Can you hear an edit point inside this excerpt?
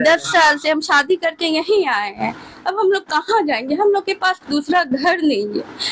no; 0 cuts

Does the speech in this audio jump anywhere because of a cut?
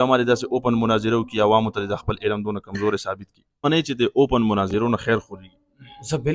yes; 1 cut; at 3.6 s

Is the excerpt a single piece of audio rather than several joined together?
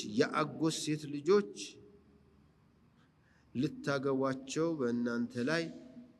yes; 0 cuts

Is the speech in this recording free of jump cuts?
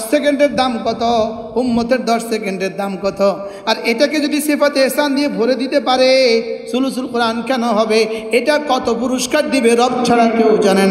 yes; 0 cuts

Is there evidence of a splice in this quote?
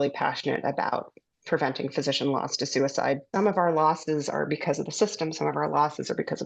yes; 1 cut; at 3.3 s

